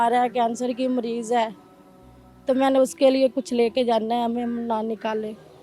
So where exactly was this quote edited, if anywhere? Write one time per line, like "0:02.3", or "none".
none